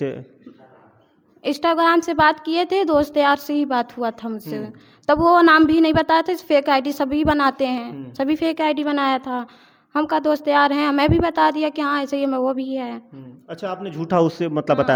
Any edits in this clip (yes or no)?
no